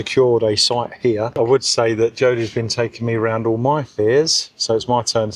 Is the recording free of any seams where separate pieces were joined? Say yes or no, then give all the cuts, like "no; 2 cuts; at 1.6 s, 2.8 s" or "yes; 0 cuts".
no; 1 cut; at 1.3 s